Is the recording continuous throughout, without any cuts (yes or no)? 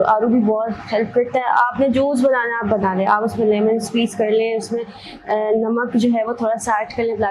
yes